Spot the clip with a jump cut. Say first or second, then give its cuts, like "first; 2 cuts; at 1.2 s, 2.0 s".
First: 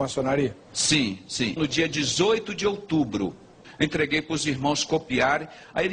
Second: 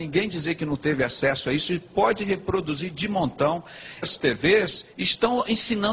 first; 1 cut; at 3.6 s